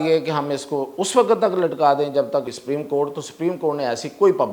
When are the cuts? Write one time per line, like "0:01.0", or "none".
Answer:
0:02.4